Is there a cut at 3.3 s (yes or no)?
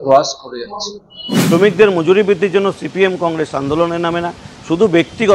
no